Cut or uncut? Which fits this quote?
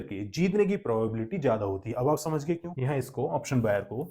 cut